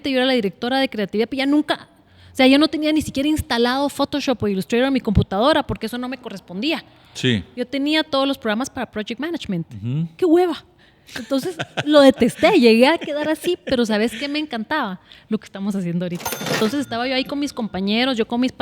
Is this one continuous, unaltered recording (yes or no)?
no